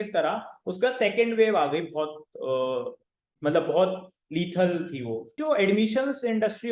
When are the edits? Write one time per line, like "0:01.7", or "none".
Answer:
0:05.4